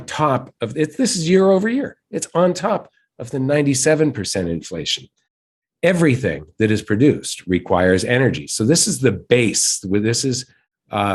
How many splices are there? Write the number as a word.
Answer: zero